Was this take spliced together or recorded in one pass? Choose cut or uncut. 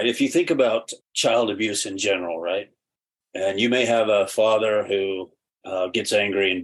cut